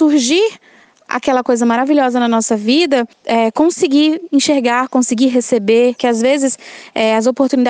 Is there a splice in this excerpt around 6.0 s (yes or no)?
yes